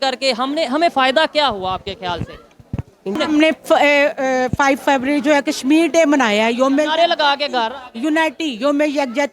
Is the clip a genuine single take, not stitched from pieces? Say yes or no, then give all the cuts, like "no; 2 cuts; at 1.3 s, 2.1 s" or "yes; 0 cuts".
no; 1 cut; at 3.2 s